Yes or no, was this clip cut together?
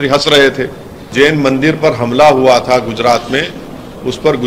yes